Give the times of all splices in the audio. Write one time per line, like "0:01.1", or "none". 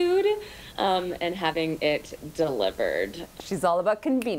0:03.5